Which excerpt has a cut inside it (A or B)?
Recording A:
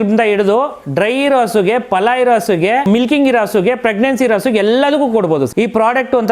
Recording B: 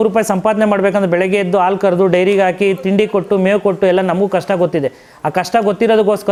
A